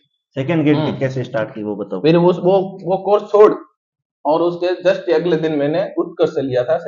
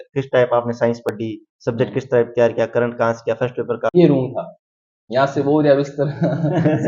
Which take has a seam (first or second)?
second